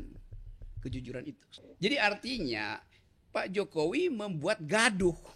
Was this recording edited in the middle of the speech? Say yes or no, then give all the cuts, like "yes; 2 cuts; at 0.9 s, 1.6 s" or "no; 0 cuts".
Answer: yes; 1 cut; at 1.5 s